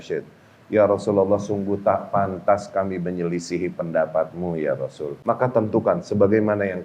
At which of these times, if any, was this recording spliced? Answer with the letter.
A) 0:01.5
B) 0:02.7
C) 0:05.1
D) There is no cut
C